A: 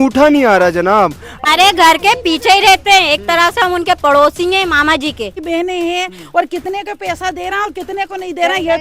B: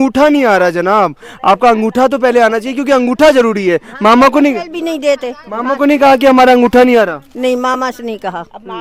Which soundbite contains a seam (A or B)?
A